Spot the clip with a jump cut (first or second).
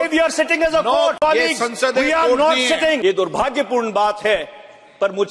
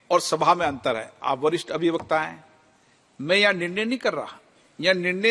first